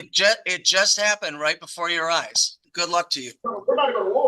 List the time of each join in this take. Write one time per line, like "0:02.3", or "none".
0:02.6